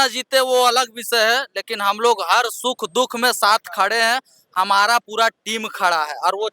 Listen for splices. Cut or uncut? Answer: uncut